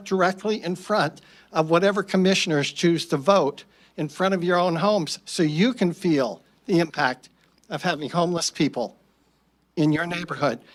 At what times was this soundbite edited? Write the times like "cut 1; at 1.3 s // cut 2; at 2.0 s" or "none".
none